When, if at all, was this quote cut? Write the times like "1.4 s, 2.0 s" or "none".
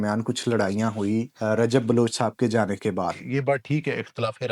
1.3 s, 3.2 s